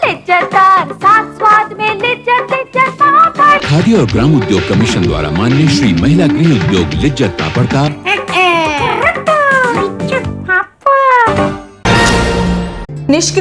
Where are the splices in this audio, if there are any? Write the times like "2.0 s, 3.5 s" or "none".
11.7 s